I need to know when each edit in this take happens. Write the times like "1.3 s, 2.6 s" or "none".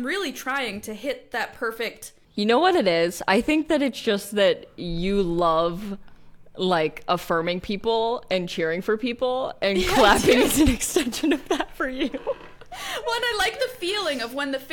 2.3 s